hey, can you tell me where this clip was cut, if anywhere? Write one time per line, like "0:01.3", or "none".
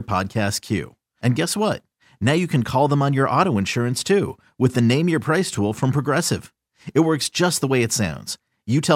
none